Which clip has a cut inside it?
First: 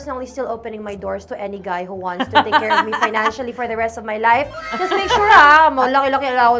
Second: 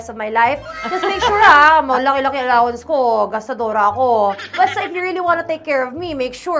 second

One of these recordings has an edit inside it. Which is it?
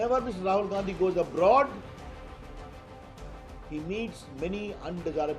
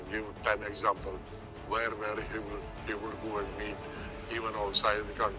first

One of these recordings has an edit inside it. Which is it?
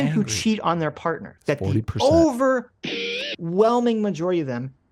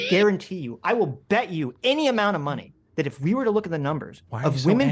first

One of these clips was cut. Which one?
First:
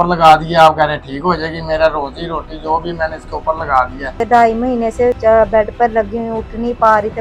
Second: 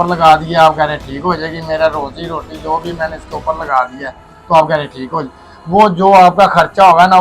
first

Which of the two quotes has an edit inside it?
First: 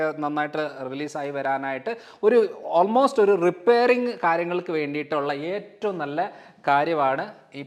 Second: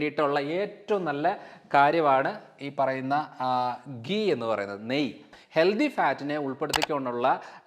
second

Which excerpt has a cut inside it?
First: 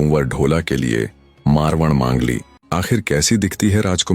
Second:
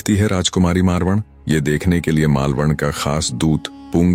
first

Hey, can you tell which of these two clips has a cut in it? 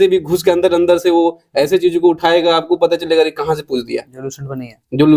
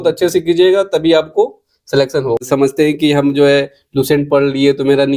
second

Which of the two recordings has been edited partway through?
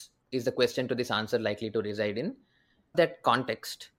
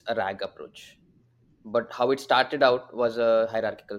first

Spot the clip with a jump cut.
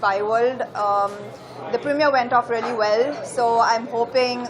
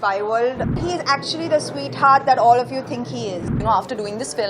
second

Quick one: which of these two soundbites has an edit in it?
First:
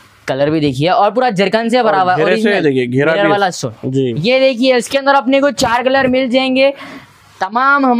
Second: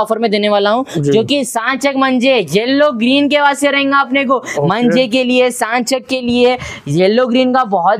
first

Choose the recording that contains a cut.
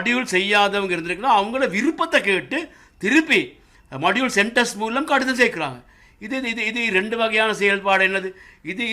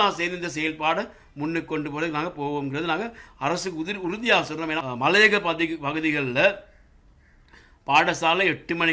second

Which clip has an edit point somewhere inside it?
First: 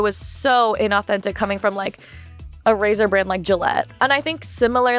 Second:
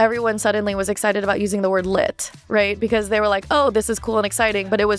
first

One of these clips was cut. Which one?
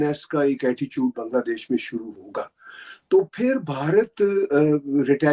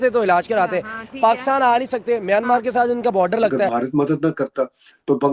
second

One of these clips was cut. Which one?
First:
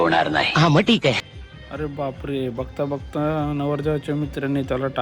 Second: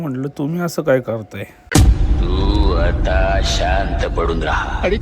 first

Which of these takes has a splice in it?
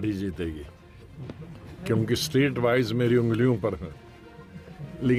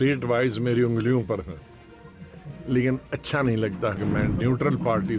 second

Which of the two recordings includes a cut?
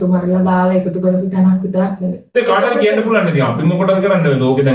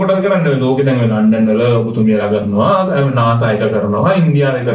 first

